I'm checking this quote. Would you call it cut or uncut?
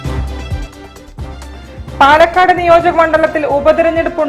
cut